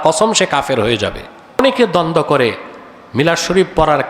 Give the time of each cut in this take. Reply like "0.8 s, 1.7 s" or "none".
1.6 s